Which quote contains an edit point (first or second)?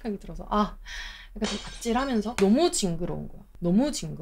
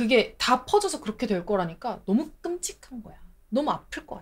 first